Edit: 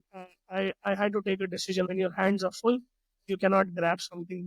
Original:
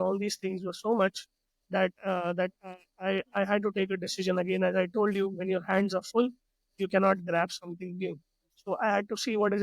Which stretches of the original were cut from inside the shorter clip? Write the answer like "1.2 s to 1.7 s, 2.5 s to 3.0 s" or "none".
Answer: 4.3 s to 5.4 s

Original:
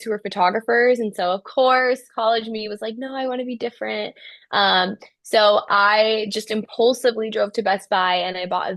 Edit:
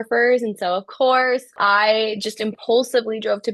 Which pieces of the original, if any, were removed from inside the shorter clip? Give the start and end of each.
2.1 s to 5.6 s

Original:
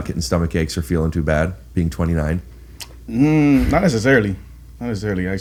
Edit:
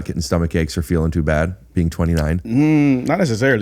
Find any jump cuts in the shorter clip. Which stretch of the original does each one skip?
2.4 s to 3.1 s

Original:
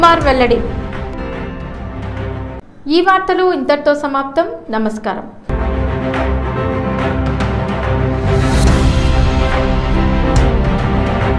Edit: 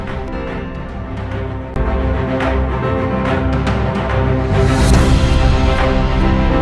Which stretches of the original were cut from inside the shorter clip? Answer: 2.5 s to 5.4 s

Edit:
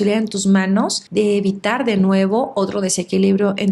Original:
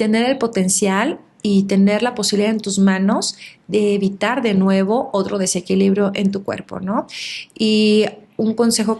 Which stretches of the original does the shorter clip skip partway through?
3.3 s to 3.6 s

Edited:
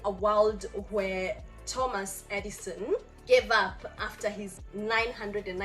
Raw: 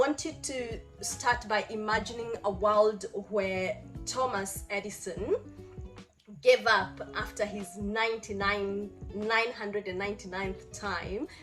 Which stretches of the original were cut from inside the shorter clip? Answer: 5.5 s to 6.3 s, 7.7 s to 9.0 s

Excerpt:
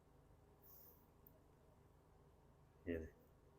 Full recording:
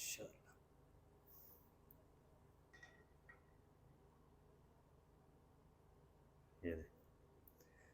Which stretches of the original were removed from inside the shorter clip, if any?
2.7 s to 5.8 s

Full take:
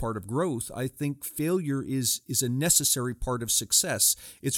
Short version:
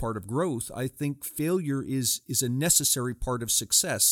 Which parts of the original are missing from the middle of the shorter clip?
none

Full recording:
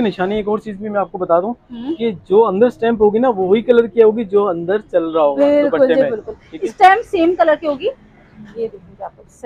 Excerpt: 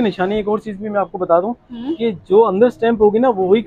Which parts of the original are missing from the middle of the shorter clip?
none

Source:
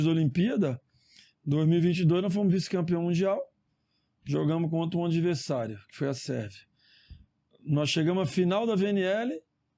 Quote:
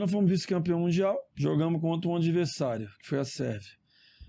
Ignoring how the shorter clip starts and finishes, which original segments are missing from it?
3.5 s to 4.2 s

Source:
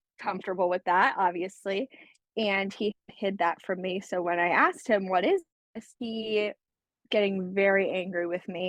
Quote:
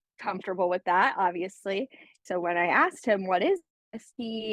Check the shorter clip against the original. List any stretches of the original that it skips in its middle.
2.2 s to 4.0 s

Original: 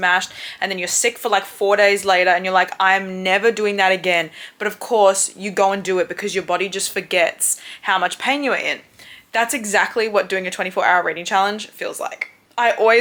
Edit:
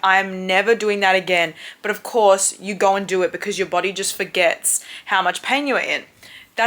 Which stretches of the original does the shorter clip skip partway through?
none

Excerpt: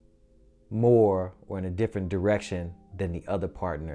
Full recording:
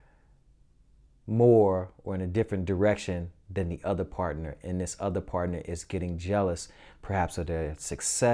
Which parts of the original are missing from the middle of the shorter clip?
none

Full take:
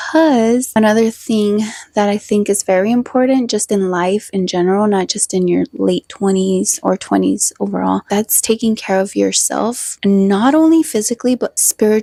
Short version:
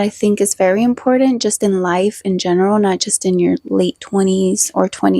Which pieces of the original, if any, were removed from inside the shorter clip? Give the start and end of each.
none

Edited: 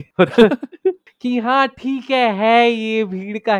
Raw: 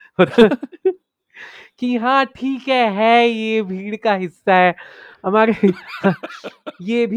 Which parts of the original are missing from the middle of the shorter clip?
1.1 s to 1.7 s

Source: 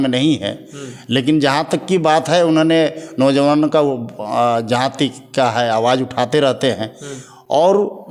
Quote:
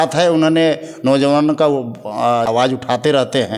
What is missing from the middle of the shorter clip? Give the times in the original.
4.6 s to 5.8 s

